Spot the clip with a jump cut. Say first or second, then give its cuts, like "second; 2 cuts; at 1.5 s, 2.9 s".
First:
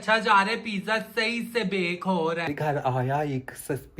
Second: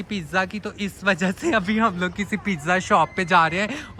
first; 1 cut; at 2.5 s